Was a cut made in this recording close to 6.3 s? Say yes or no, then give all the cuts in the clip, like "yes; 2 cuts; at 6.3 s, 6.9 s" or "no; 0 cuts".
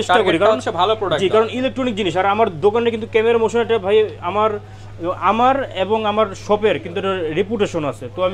no; 0 cuts